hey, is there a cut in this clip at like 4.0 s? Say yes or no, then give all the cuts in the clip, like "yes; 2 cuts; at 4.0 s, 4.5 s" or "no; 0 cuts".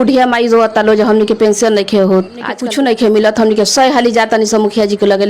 no; 1 cut; at 2.6 s